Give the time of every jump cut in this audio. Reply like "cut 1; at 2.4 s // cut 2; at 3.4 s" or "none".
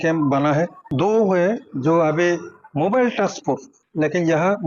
cut 1; at 1.7 s